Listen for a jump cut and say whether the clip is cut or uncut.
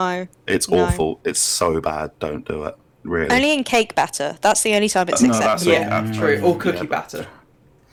uncut